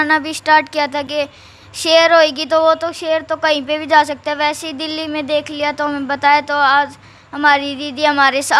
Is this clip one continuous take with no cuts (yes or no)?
yes